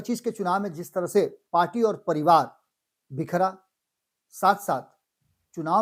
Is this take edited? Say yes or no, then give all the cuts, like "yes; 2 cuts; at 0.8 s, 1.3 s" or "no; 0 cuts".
no; 0 cuts